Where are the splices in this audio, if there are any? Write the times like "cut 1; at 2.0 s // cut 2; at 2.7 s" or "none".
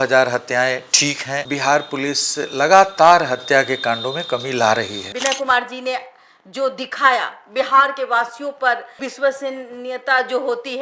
cut 1; at 5.1 s // cut 2; at 9.0 s